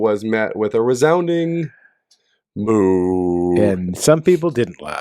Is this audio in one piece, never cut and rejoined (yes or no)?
yes